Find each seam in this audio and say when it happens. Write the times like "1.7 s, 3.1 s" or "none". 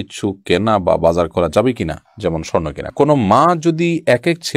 2.9 s